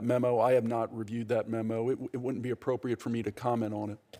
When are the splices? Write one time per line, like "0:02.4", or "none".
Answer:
none

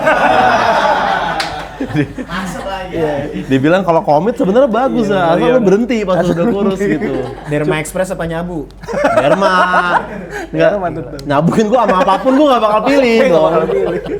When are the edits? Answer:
none

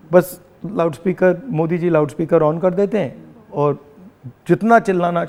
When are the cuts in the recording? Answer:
none

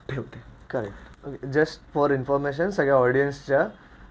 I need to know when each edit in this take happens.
0:01.0

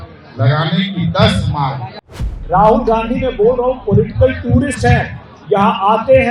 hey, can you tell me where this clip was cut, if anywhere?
0:02.2

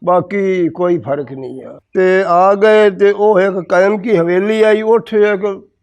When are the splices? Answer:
0:01.8

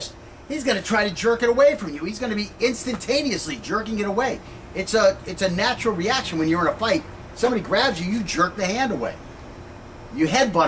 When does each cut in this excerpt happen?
0:03.2

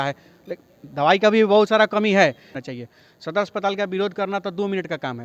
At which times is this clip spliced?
0:02.5

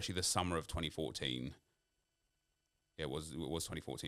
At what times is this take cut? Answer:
none

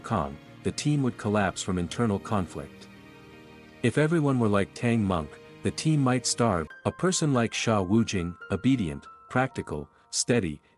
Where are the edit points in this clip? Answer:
0:06.7

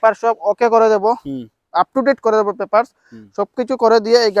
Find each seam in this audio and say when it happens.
none

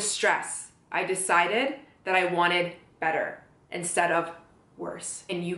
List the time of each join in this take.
none

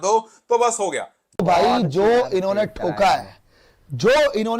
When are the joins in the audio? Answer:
0:01.2

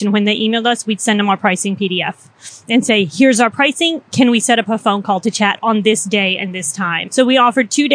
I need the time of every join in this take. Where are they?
0:07.0

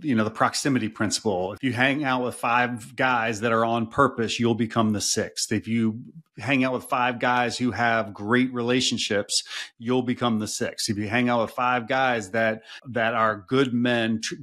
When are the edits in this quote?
0:01.5
0:12.8

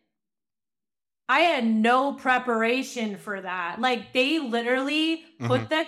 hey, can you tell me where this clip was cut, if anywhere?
none

